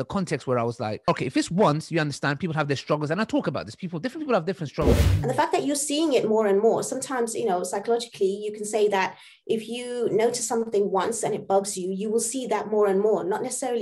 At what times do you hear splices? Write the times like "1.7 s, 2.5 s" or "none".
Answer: 1.1 s, 5.0 s